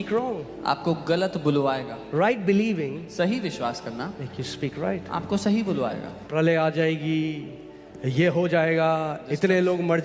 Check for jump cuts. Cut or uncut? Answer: cut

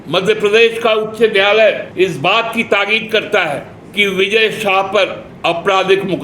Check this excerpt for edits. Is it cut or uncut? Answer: cut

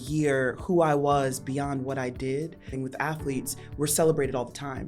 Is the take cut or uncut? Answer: cut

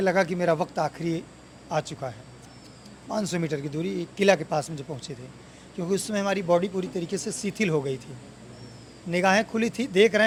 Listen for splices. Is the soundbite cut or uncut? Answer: uncut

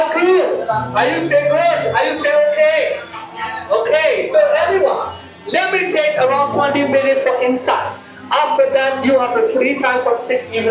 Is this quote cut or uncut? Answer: uncut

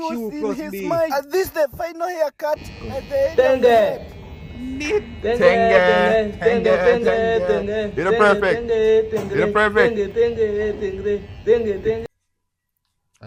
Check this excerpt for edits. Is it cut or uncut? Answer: uncut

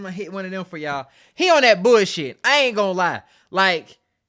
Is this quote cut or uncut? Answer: uncut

